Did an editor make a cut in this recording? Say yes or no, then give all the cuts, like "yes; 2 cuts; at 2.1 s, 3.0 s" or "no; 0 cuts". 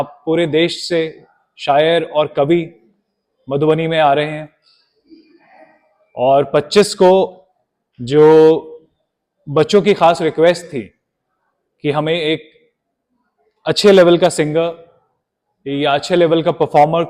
no; 0 cuts